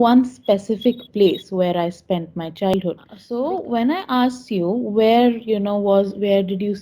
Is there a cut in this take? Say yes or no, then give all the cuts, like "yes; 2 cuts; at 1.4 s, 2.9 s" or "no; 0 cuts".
yes; 1 cut; at 2.7 s